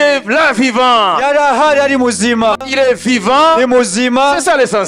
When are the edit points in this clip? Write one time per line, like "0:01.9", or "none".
0:02.7